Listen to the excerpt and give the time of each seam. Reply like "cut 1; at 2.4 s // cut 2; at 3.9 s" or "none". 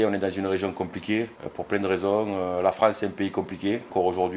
none